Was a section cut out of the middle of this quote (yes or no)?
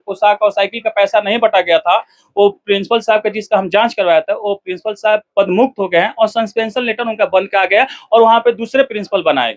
no